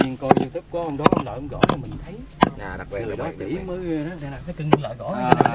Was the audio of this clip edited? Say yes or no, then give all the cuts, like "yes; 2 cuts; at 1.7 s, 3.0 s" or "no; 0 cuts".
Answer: no; 0 cuts